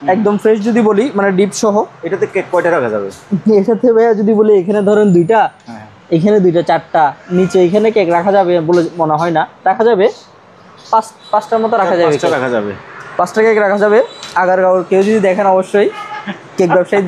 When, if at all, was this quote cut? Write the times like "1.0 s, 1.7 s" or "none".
none